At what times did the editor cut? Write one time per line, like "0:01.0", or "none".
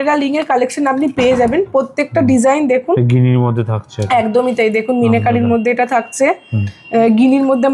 none

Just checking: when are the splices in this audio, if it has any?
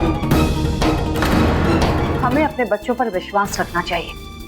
0:02.2

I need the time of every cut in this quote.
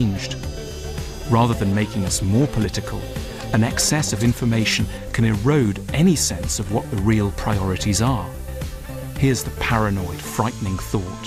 none

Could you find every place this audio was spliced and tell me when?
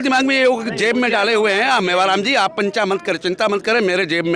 none

